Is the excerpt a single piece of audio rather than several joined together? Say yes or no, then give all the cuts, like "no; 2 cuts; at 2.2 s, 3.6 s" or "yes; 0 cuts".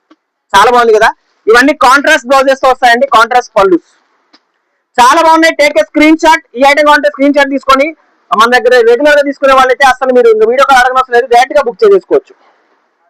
yes; 0 cuts